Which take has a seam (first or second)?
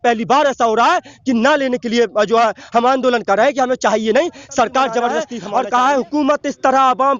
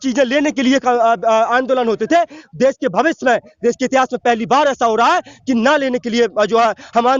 first